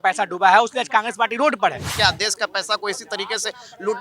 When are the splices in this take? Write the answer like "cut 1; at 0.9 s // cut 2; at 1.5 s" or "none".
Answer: cut 1; at 1.9 s